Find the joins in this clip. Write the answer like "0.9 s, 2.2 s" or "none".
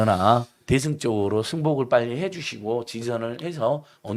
none